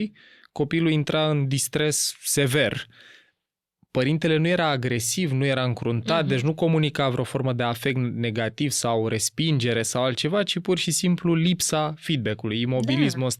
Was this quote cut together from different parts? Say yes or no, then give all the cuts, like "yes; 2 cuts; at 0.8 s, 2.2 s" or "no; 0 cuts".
no; 0 cuts